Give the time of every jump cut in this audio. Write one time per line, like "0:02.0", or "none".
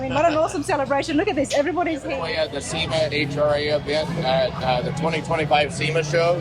0:02.1

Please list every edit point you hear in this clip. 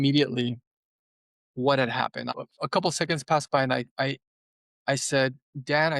0:02.3

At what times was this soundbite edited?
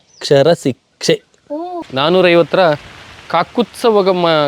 0:01.8

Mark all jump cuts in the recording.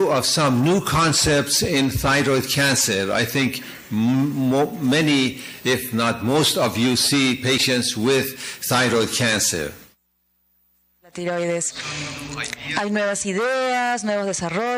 none

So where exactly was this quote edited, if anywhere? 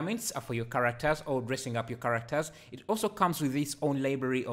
none

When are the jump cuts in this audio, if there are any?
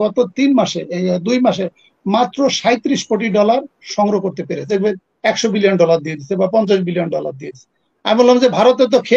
0:04.7

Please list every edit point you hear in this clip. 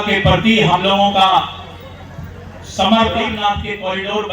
0:03.3

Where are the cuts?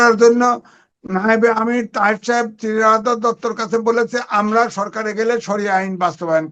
none

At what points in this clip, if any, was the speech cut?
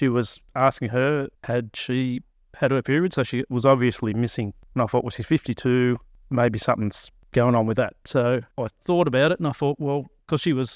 0:04.6
0:06.1
0:07.2

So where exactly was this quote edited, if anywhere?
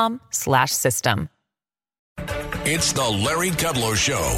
0:02.2

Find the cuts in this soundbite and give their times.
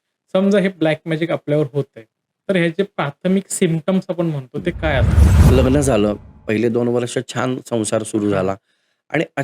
0:05.2

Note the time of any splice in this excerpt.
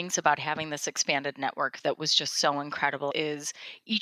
0:03.1

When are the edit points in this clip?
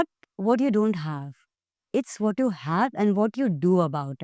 none

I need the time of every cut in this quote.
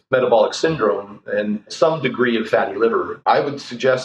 0:01.7
0:03.1

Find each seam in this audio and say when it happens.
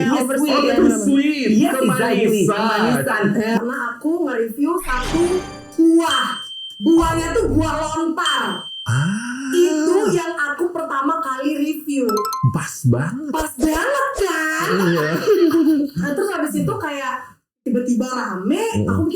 0:03.6

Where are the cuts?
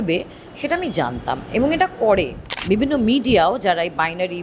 0:02.5

